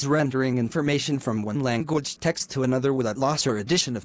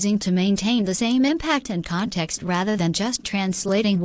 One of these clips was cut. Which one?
first; 1 cut; at 2.6 s

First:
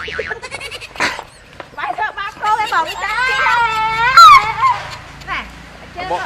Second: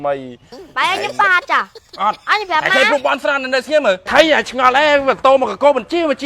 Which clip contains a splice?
second; 1 cut; at 4.1 s

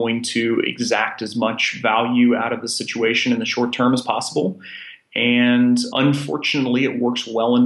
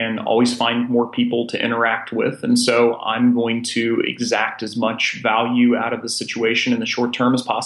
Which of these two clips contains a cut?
first; 1 cut; at 5.9 s

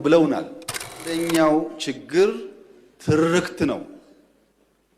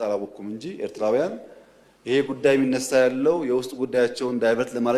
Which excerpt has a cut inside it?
first; 1 cut; at 1.1 s

